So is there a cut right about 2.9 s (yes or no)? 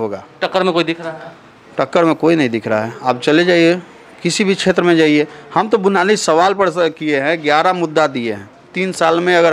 no